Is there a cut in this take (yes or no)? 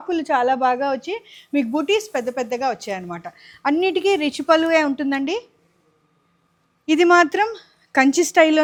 no